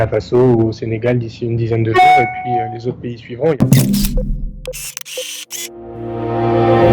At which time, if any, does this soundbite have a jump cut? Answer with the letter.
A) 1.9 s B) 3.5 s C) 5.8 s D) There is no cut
B